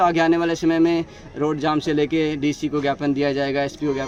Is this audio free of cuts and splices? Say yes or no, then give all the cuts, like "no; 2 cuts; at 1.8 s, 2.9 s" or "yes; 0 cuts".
yes; 0 cuts